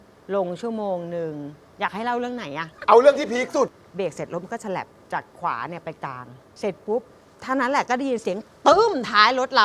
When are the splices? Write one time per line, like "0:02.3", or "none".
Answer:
0:02.5
0:03.8